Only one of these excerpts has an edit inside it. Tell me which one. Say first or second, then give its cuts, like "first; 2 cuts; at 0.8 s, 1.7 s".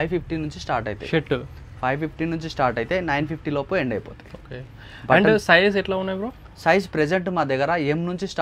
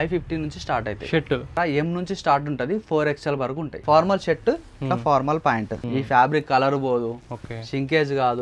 second; 3 cuts; at 1.6 s, 3.7 s, 5.8 s